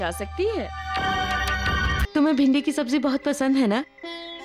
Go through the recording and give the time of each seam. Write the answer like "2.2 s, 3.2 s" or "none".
2.0 s